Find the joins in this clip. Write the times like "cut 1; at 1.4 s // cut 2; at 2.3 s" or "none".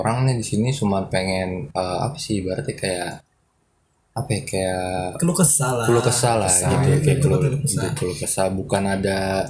none